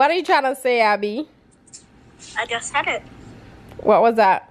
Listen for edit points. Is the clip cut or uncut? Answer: uncut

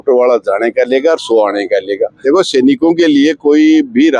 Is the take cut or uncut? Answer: cut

